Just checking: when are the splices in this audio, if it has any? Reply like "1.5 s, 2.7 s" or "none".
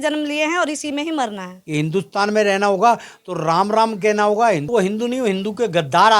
1.5 s, 4.6 s